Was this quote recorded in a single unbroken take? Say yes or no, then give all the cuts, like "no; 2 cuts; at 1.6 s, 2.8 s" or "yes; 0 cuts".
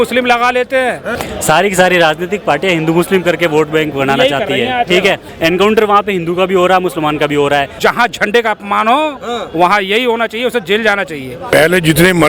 no; 4 cuts; at 1.1 s, 5.3 s, 7.7 s, 11.5 s